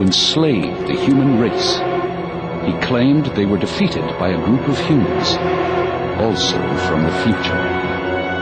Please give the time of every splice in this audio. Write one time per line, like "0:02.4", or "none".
none